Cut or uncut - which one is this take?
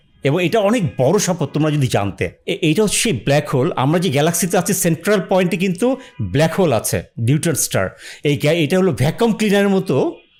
uncut